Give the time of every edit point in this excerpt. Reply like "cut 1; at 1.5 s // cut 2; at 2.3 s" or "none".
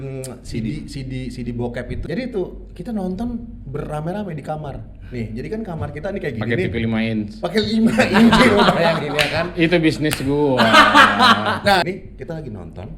cut 1; at 2.0 s // cut 2; at 11.8 s